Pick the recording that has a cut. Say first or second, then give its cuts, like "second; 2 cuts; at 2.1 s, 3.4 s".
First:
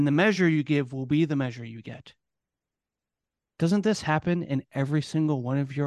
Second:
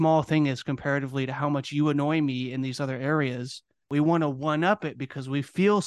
second; 1 cut; at 3.9 s